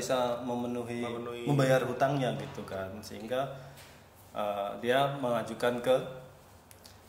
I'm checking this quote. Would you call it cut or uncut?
uncut